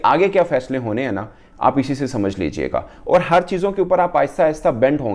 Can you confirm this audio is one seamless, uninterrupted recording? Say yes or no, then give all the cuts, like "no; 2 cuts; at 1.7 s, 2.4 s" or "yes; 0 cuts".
yes; 0 cuts